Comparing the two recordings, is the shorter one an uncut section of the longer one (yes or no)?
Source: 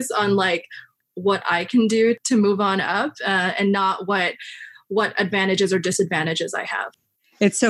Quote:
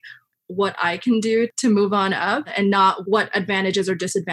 no